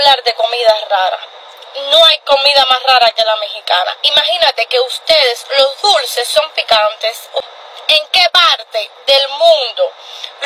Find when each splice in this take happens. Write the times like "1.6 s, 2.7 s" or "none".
7.5 s